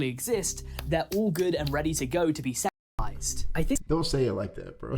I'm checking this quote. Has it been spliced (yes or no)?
yes